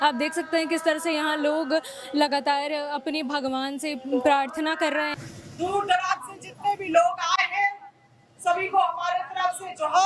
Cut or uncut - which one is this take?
cut